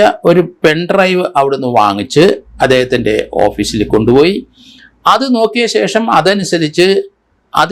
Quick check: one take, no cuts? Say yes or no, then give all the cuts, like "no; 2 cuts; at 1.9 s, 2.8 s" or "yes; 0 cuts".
yes; 0 cuts